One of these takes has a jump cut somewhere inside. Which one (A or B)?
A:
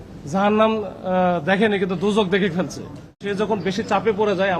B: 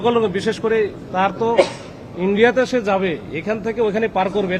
A